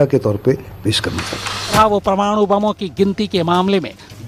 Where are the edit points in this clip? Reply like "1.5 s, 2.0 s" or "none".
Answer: 1.7 s